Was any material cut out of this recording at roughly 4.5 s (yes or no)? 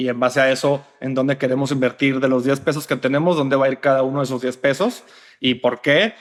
no